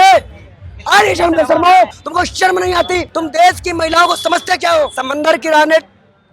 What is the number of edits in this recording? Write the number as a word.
three